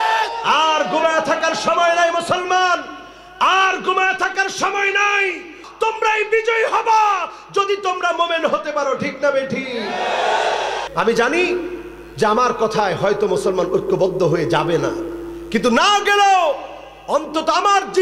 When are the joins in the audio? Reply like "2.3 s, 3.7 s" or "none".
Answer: 5.6 s, 10.8 s